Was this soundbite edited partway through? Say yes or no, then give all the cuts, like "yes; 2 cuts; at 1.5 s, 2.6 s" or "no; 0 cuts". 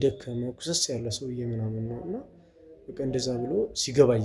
no; 0 cuts